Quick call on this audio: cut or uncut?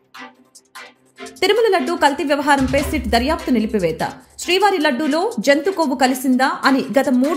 uncut